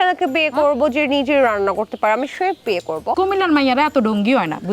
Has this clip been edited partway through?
yes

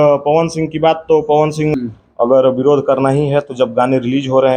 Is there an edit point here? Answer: yes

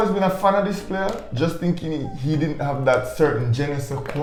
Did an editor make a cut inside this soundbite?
no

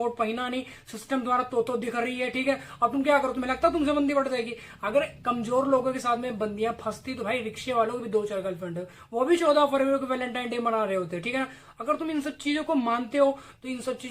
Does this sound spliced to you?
no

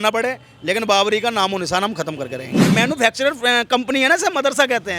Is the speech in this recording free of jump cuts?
no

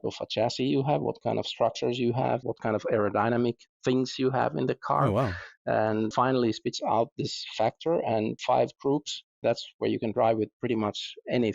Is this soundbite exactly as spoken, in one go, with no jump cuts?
no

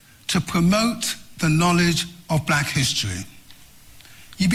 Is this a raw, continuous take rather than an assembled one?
yes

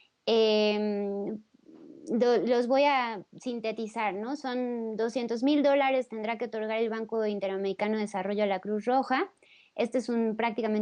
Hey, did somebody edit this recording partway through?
yes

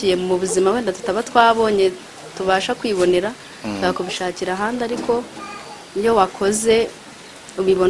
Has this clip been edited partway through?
no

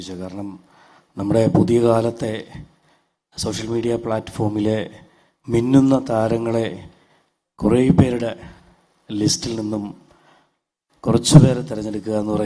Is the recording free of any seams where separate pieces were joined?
yes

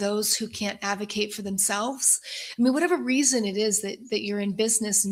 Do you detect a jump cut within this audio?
no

